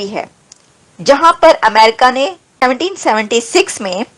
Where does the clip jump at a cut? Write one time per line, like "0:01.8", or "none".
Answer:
0:02.6